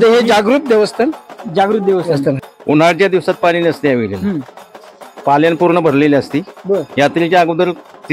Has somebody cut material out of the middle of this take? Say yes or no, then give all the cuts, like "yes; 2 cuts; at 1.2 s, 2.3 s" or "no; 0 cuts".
yes; 1 cut; at 2.5 s